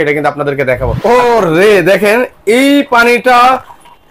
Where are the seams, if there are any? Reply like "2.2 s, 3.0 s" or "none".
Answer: 1.0 s